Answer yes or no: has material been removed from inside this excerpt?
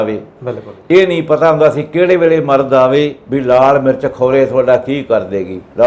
yes